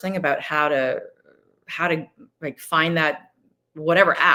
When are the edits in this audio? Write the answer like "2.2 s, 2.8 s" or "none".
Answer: none